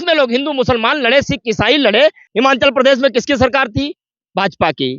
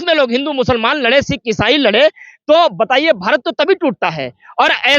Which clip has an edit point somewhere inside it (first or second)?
first